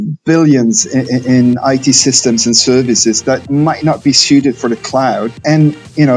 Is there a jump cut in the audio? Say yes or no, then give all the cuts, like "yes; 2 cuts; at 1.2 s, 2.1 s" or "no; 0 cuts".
yes; 1 cut; at 3.5 s